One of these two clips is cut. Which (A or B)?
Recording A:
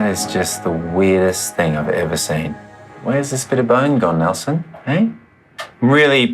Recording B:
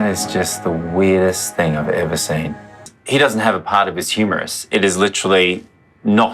B